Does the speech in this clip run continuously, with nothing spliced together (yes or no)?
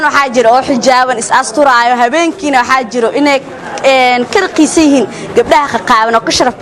yes